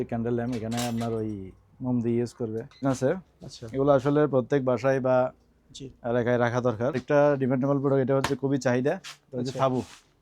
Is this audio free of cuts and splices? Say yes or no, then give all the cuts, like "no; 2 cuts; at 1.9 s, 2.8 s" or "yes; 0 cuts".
no; 2 cuts; at 2.8 s, 7.0 s